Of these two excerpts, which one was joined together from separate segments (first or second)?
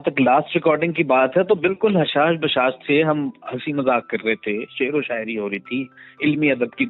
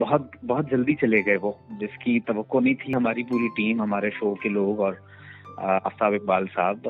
second